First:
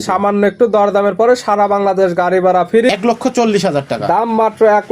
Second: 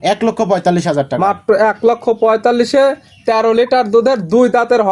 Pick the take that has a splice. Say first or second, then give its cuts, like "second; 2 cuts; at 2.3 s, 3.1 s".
first; 1 cut; at 2.9 s